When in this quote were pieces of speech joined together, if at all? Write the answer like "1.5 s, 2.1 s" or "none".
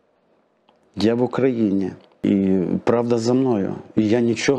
2.2 s